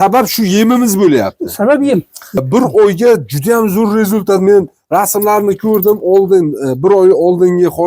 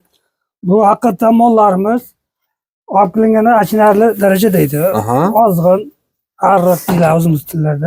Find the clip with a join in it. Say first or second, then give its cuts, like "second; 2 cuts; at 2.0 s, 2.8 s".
first; 1 cut; at 2.4 s